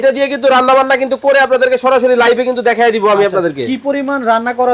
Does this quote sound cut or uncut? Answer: uncut